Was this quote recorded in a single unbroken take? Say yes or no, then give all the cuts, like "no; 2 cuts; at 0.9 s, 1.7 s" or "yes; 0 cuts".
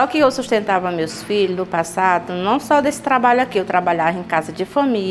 yes; 0 cuts